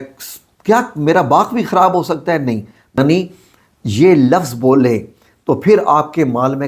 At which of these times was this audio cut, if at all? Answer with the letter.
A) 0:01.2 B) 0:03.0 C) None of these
B